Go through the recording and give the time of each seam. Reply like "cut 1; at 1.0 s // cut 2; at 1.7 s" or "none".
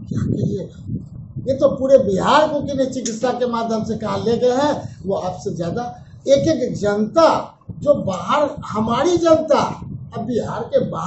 cut 1; at 1.1 s